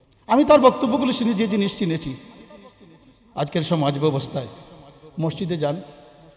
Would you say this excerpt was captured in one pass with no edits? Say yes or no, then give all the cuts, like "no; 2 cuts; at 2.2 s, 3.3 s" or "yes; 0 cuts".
yes; 0 cuts